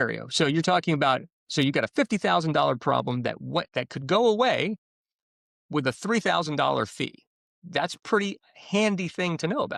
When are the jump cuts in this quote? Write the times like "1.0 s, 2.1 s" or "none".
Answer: none